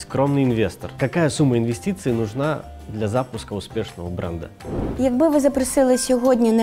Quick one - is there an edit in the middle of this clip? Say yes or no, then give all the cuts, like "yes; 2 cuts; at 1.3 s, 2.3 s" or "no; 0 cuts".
yes; 2 cuts; at 0.9 s, 4.8 s